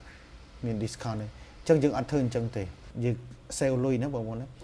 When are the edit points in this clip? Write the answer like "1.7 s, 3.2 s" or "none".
2.8 s